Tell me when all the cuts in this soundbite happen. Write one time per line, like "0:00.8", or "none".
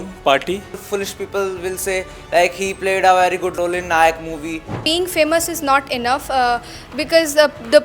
0:00.8
0:03.5
0:04.7